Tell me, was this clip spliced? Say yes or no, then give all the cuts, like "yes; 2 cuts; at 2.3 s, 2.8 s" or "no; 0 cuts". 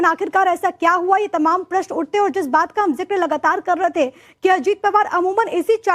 yes; 1 cut; at 3.6 s